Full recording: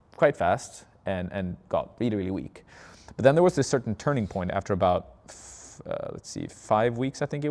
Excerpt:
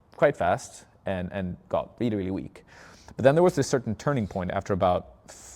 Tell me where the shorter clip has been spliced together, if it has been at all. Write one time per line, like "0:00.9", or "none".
none